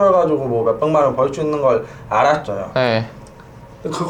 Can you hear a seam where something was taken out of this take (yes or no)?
no